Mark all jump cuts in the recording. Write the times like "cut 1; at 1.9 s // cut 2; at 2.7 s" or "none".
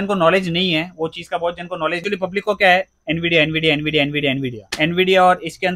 cut 1; at 2.0 s